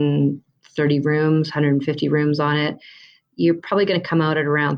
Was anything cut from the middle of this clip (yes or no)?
no